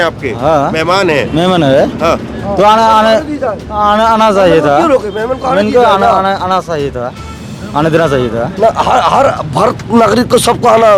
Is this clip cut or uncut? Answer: uncut